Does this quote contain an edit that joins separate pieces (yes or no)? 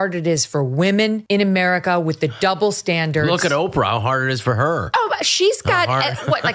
yes